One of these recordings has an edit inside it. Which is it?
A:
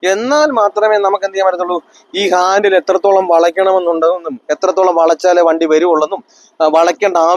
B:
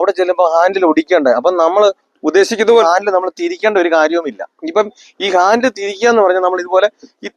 B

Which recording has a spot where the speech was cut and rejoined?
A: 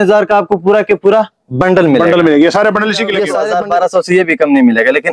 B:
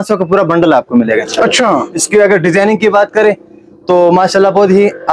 A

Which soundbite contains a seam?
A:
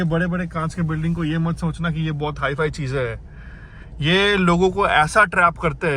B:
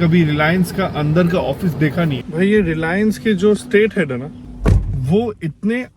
B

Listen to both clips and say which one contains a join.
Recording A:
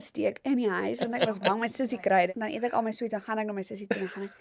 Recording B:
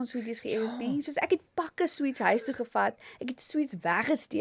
A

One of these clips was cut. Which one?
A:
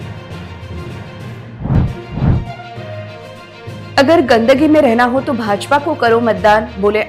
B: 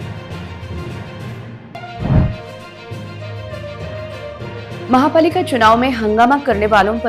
A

